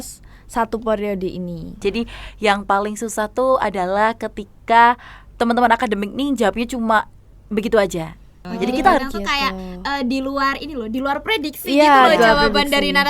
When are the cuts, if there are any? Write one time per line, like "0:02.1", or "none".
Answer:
0:01.7
0:09.0